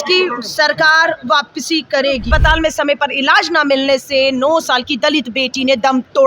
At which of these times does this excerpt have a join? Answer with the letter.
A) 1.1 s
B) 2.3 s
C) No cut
B